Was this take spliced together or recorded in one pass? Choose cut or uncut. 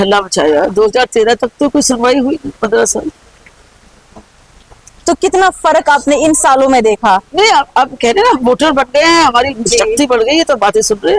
uncut